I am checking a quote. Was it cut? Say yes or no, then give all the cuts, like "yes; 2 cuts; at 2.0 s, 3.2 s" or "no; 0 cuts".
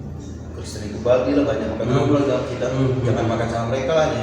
no; 0 cuts